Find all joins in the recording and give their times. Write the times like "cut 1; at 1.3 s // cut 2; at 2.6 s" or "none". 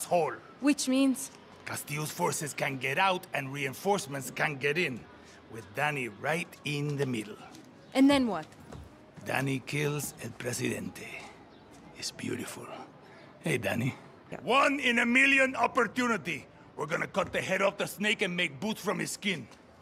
cut 1; at 14.3 s